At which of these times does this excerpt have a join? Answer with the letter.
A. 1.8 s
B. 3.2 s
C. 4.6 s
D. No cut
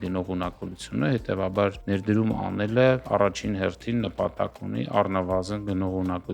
A